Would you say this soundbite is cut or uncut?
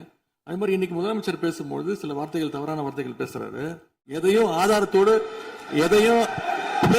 cut